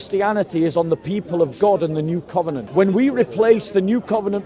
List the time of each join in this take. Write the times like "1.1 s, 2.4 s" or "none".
2.6 s